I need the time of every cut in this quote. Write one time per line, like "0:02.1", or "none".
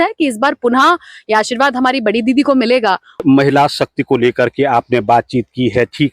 0:03.2

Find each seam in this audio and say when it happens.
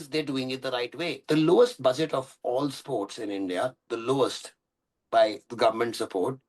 0:01.2

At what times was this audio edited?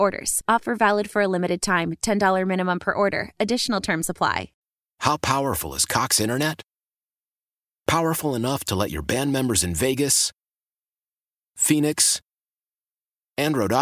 0:04.5

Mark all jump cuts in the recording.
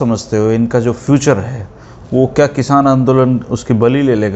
none

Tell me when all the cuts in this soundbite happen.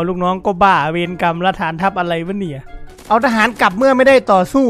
0:02.6

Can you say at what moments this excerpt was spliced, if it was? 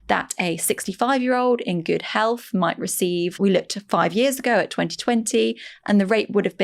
0:03.3

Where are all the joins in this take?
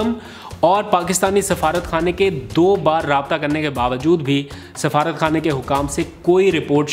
none

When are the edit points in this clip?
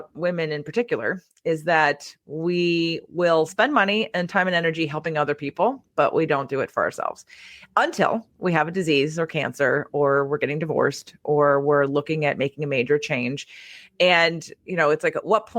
none

